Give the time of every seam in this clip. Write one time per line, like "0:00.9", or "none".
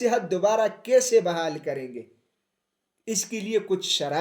none